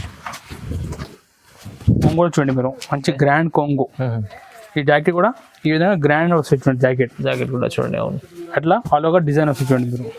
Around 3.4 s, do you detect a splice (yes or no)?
no